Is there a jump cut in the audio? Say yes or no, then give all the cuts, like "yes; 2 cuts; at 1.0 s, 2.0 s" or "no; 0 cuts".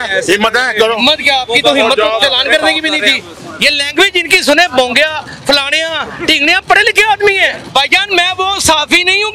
yes; 2 cuts; at 3.3 s, 7.6 s